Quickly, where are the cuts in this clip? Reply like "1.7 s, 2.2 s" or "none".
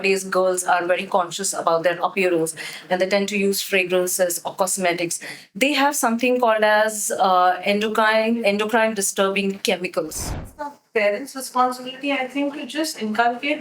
10.2 s